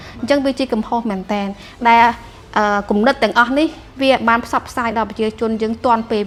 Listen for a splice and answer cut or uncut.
uncut